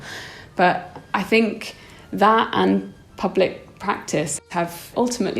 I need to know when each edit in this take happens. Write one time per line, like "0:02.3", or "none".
0:04.4